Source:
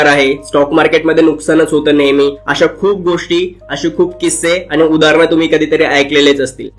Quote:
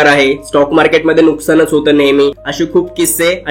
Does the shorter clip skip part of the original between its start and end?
yes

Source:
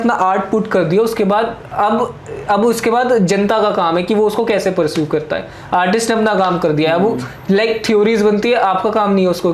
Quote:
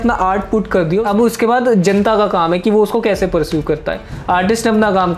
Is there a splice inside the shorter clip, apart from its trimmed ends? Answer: yes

